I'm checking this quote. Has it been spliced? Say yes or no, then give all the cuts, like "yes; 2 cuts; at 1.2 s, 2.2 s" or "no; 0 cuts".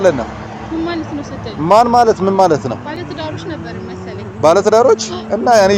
no; 0 cuts